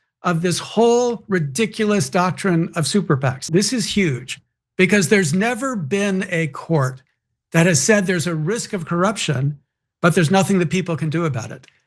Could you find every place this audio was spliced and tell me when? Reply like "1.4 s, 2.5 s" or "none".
3.4 s

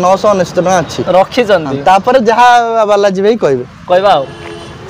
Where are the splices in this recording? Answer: none

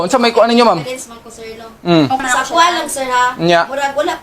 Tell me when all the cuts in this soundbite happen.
2.2 s

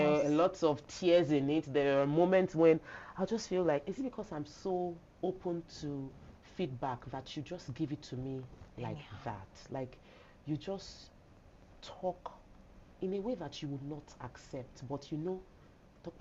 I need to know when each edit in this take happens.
none

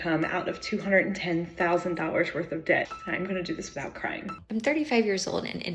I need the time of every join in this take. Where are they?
2.9 s, 4.4 s

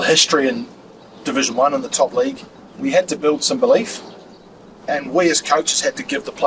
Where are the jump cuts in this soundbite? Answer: none

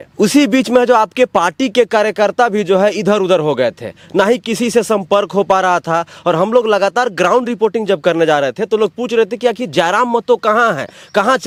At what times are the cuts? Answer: none

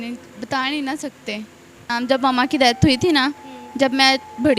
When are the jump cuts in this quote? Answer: 1.9 s

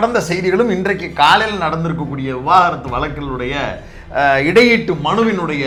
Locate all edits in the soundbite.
none

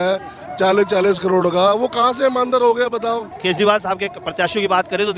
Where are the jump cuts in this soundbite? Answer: 3.3 s

